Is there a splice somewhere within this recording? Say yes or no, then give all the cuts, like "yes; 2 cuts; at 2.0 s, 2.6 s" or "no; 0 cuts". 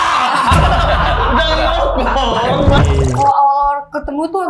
yes; 1 cut; at 2.8 s